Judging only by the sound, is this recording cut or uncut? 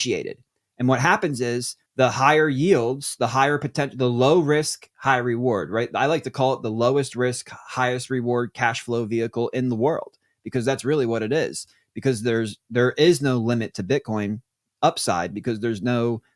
cut